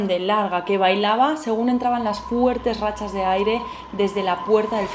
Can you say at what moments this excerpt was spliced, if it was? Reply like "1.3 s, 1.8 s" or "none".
none